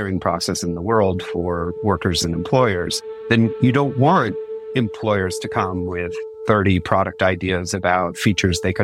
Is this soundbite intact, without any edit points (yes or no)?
no